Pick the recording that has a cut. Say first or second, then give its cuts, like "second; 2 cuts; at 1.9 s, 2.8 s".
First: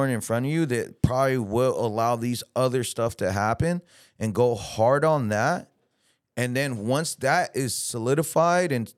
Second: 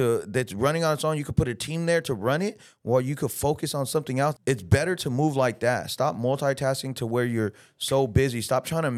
second; 1 cut; at 4.3 s